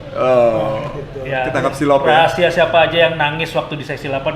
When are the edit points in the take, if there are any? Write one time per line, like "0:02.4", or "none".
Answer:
none